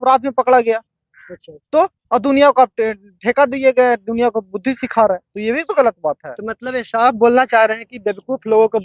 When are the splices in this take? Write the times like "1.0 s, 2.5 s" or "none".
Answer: none